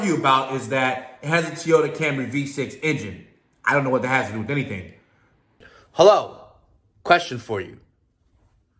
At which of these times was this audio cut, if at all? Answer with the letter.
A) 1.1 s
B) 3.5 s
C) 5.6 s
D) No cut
C